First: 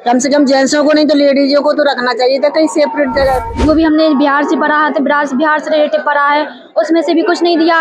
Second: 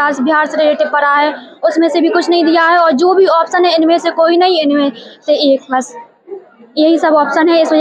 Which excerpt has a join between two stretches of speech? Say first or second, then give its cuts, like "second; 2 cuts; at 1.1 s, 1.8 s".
first; 1 cut; at 3.5 s